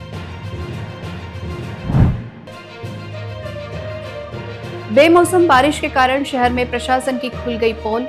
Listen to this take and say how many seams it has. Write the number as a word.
two